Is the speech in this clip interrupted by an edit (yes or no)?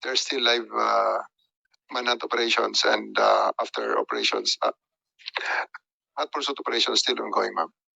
no